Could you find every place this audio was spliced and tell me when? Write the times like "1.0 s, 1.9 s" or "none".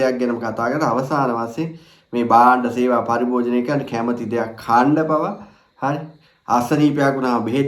none